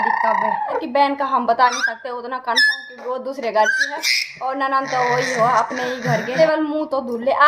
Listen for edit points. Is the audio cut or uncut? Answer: cut